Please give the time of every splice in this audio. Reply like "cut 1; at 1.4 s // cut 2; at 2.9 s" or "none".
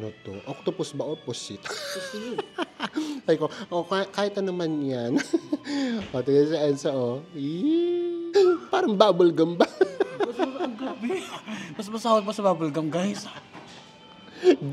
cut 1; at 8.2 s

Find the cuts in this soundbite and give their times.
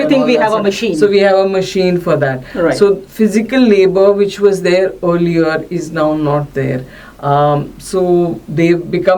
none

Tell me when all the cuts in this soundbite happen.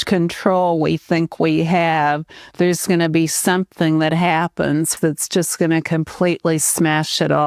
cut 1; at 4.9 s

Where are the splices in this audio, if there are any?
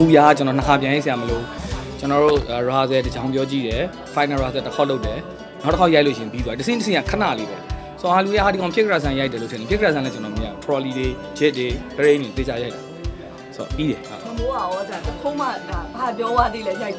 none

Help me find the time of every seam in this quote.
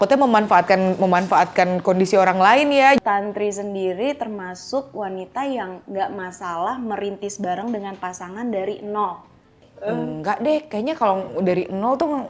cut 1; at 3.0 s // cut 2; at 9.7 s

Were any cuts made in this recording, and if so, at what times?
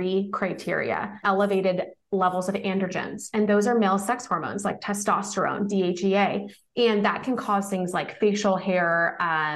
cut 1; at 1.2 s

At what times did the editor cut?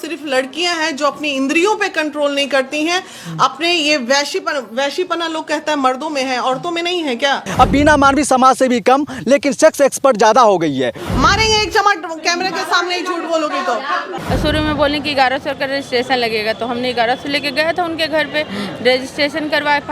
cut 1; at 7.4 s // cut 2; at 11.0 s // cut 3; at 14.2 s

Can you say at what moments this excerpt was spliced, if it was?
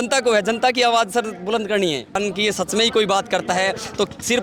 cut 1; at 2.2 s

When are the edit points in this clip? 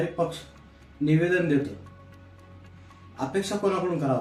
none

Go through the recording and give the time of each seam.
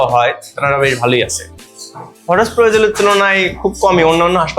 cut 1; at 1.6 s

